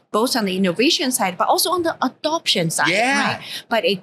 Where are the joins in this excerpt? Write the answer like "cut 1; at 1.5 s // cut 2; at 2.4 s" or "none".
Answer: none